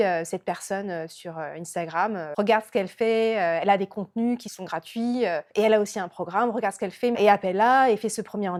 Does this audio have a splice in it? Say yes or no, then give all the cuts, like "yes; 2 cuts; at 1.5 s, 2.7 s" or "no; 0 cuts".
no; 0 cuts